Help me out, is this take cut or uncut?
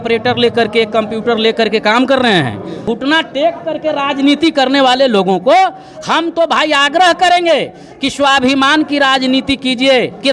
cut